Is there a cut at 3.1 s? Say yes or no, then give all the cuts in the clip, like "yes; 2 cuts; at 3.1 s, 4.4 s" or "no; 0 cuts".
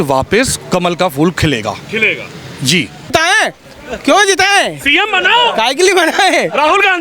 yes; 1 cut; at 3.1 s